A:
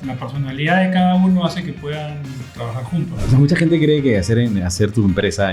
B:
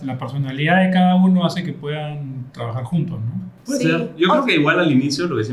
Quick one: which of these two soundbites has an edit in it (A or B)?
A